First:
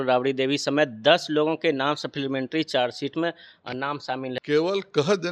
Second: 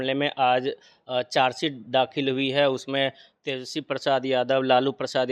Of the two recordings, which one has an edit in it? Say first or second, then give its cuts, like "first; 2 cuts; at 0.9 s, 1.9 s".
first; 1 cut; at 4.4 s